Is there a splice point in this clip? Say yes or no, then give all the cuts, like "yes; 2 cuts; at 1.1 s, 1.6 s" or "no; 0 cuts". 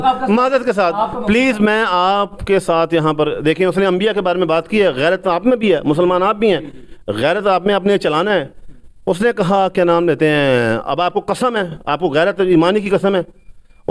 no; 0 cuts